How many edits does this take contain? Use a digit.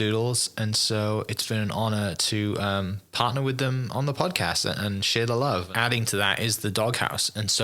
1